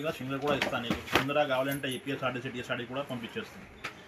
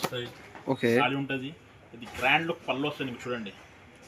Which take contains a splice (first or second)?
second